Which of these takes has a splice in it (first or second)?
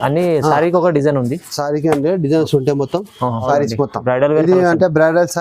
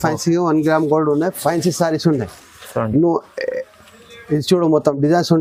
first